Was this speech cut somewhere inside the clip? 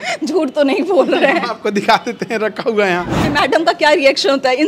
yes; 1 cut; at 3.3 s

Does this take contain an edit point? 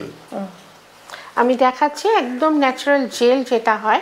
no; 0 cuts

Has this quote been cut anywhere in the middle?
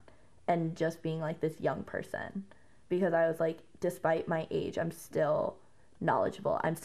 no; 0 cuts

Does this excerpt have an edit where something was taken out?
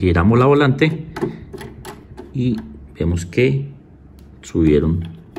no; 0 cuts

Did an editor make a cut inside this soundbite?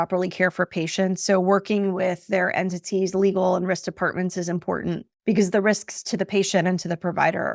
no; 0 cuts

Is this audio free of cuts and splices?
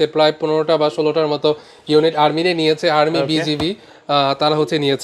yes; 0 cuts

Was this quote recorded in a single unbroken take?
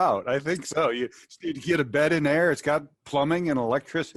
yes; 0 cuts

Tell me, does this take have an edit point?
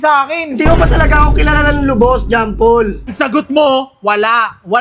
yes; 1 cut; at 3.1 s

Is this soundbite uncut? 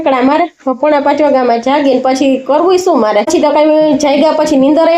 yes; 0 cuts

